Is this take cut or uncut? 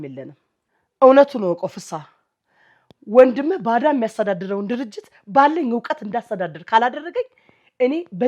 uncut